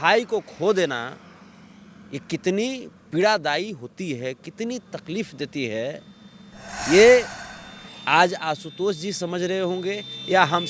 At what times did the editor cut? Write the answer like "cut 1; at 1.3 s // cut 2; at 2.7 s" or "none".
none